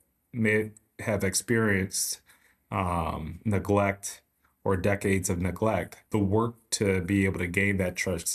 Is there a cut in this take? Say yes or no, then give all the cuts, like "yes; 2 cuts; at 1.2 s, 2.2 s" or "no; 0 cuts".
yes; 1 cut; at 6.0 s